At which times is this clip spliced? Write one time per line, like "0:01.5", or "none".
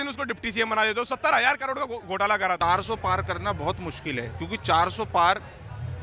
0:02.6